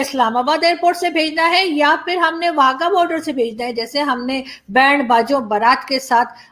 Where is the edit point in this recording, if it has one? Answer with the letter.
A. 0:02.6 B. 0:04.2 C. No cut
C